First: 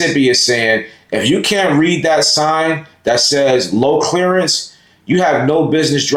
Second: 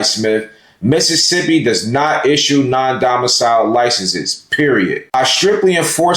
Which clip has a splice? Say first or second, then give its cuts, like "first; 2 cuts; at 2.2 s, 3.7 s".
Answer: second; 1 cut; at 5.1 s